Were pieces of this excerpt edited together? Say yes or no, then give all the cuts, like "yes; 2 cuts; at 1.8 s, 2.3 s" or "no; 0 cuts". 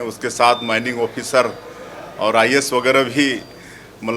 no; 0 cuts